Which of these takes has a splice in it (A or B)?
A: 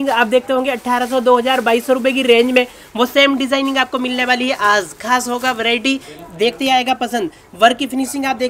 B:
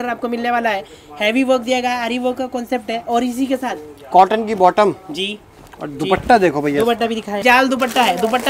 B